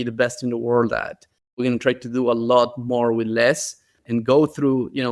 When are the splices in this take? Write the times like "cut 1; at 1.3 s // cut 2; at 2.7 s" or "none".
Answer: cut 1; at 1.6 s